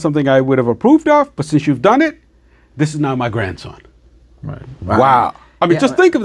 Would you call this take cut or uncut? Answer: uncut